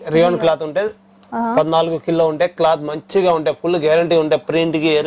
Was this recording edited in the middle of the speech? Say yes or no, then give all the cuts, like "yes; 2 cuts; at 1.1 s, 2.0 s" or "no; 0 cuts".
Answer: no; 0 cuts